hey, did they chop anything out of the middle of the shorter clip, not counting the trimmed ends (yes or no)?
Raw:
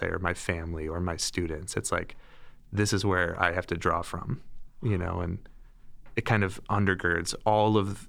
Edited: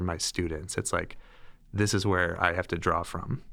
no